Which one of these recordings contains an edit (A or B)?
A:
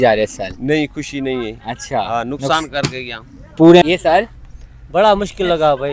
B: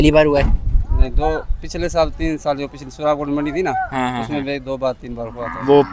A